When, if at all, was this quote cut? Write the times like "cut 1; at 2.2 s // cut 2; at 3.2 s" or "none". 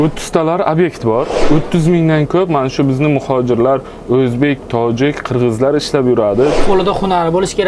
cut 1; at 1.4 s // cut 2; at 6.6 s